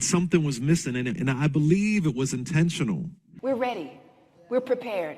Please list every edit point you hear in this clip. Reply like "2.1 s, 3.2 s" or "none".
3.2 s